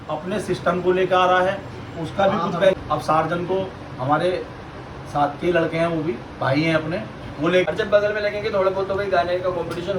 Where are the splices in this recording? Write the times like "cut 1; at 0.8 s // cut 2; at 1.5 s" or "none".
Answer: cut 1; at 2.8 s // cut 2; at 7.6 s